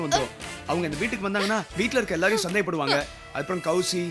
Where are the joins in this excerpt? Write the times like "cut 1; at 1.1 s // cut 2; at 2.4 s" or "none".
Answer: none